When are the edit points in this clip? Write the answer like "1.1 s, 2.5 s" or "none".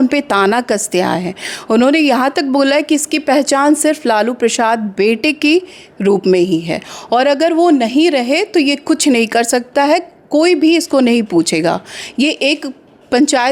none